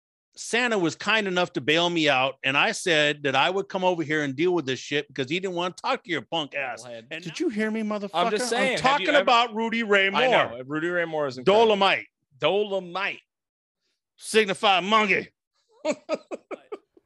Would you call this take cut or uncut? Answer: cut